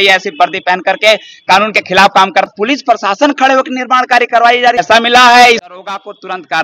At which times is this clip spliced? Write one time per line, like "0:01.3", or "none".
0:02.5
0:04.8
0:05.8